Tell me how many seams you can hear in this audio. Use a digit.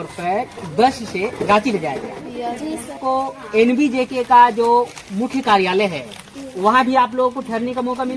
1